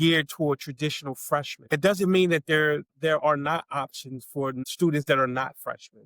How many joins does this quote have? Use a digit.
3